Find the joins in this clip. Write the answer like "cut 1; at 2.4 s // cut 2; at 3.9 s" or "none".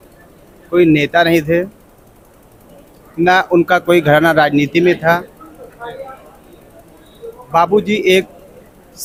none